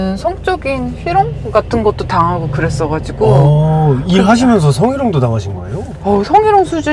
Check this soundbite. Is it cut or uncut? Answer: uncut